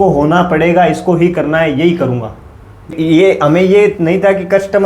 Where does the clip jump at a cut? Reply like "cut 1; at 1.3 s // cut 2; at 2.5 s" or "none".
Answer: cut 1; at 3.0 s